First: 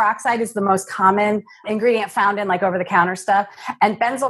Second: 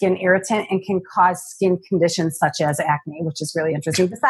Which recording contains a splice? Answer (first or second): first